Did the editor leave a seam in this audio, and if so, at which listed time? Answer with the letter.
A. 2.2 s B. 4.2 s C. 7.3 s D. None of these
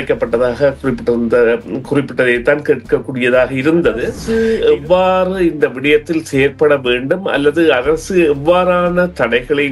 B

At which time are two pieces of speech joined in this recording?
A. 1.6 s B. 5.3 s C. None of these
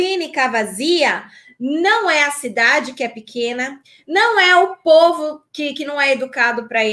C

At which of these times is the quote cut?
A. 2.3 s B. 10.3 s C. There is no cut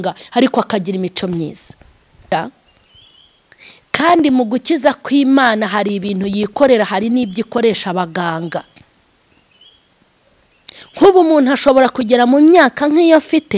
A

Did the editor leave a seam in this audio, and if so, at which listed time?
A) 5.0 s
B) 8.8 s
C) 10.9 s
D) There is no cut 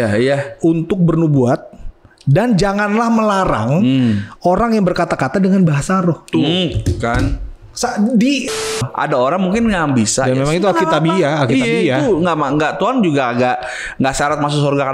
B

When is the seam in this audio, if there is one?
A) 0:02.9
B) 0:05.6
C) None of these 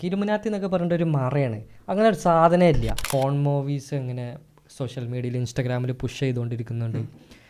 A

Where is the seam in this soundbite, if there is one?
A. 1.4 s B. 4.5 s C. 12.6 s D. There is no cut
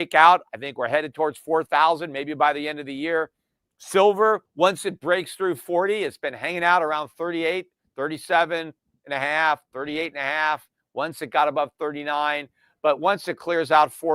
B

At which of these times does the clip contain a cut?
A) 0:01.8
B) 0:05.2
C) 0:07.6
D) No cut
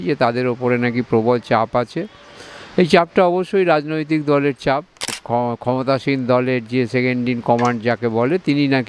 B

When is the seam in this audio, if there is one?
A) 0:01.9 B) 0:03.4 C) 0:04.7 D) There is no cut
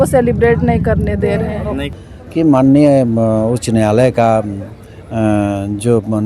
A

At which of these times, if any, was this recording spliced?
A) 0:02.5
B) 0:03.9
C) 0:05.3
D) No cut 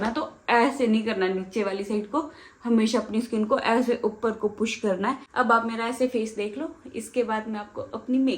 C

